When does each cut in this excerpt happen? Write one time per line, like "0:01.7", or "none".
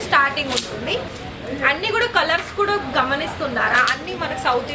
0:01.2